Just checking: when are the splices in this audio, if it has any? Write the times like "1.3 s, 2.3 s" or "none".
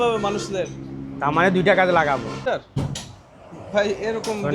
2.4 s